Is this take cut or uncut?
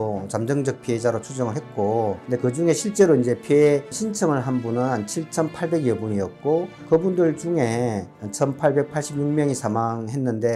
uncut